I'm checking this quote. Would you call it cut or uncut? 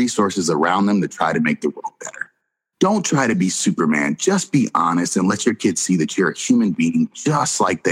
cut